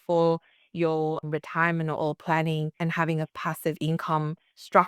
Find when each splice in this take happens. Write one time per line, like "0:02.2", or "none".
0:01.2